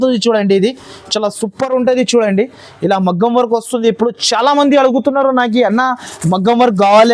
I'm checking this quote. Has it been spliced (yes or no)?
no